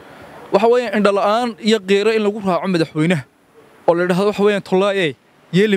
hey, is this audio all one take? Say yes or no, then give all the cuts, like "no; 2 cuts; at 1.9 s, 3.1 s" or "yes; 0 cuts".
yes; 0 cuts